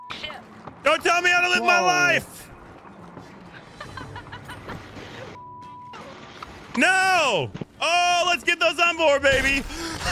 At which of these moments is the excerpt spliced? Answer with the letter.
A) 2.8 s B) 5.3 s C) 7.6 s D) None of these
C